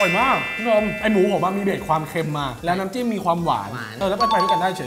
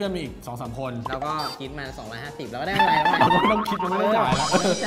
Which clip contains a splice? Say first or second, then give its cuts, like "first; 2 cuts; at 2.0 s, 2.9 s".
first; 1 cut; at 3.8 s